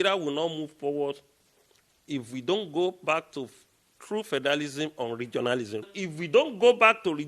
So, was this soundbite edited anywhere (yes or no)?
yes